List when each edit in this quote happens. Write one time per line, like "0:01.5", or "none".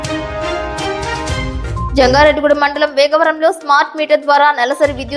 0:01.9